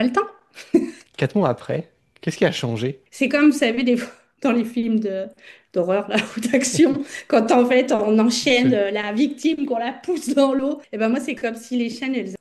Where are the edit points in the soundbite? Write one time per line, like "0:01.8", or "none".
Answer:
0:01.1
0:03.0
0:10.9